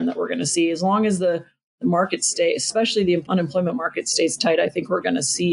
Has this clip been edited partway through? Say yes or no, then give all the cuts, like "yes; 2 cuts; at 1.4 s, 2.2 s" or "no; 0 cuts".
yes; 1 cut; at 3.3 s